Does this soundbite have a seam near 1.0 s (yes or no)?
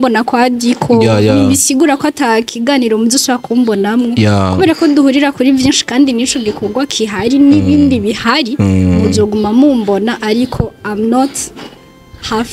no